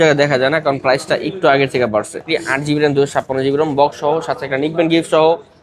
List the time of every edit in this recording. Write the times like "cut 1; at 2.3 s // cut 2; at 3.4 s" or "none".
cut 1; at 2.2 s